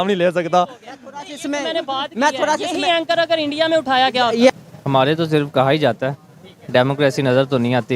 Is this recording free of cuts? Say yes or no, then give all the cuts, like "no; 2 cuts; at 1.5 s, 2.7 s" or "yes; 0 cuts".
no; 1 cut; at 4.5 s